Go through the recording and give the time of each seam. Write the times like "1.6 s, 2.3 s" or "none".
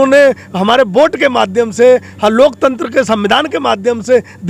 none